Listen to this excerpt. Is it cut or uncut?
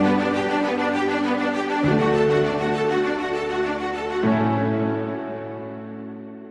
uncut